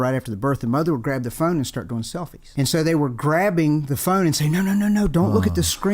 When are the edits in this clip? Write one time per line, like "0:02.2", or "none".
0:02.4